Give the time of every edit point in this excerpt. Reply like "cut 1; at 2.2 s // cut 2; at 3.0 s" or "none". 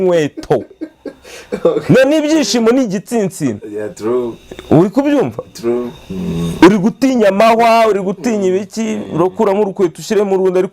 none